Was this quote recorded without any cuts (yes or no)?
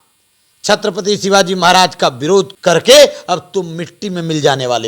no